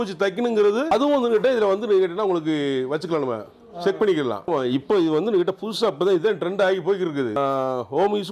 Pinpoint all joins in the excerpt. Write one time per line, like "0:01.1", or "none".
0:00.9
0:04.5
0:07.4